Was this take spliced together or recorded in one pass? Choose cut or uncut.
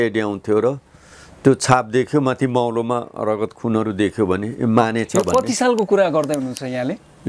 uncut